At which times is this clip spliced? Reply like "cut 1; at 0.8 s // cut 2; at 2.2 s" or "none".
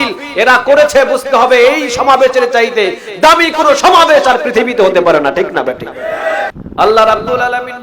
cut 1; at 6.6 s